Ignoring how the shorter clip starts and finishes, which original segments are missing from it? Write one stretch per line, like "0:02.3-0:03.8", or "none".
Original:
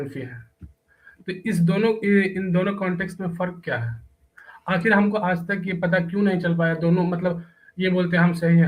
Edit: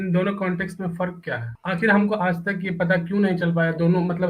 0:03.9-0:04.5